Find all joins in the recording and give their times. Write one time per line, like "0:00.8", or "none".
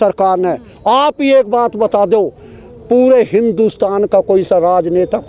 none